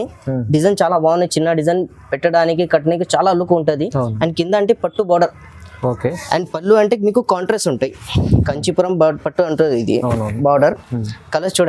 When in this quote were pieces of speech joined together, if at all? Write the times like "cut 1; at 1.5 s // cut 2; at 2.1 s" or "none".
cut 1; at 8.5 s